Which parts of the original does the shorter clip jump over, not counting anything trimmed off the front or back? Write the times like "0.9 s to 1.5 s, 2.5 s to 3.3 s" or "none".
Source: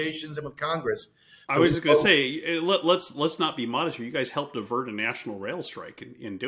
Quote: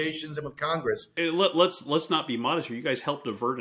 1.1 s to 2.4 s